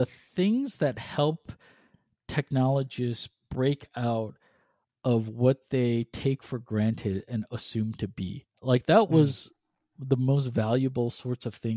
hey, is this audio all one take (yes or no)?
yes